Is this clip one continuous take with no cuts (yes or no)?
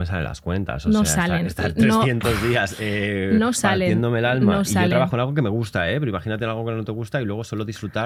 yes